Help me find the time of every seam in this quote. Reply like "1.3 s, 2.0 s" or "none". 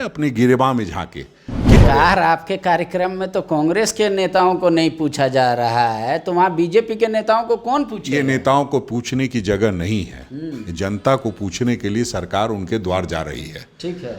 1.8 s